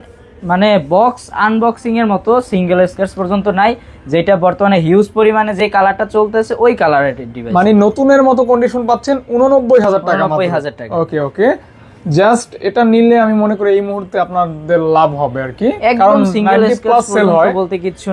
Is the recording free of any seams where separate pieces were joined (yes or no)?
yes